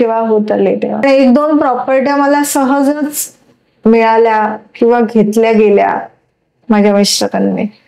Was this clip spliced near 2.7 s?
no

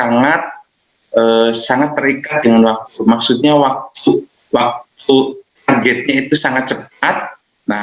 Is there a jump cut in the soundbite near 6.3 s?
no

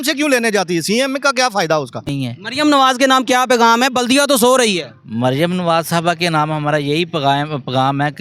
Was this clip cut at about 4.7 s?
no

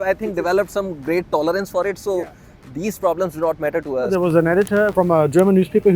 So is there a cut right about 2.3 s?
no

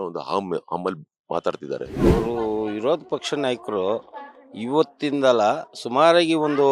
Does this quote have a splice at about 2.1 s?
yes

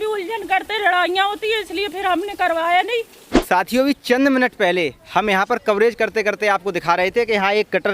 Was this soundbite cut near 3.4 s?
yes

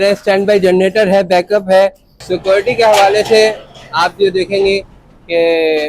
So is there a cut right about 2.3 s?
yes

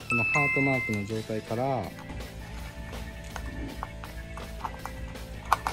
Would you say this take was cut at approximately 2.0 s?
no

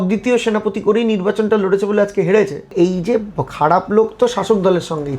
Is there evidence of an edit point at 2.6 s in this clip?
yes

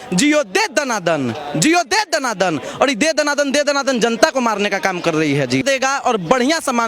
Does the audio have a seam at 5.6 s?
yes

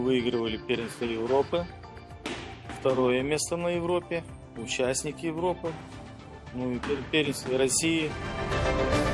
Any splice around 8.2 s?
yes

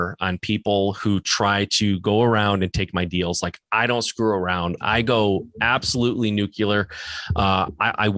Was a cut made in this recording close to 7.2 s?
no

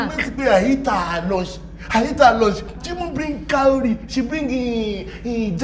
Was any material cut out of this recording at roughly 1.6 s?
no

